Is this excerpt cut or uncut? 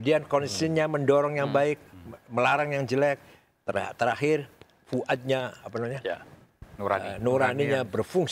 uncut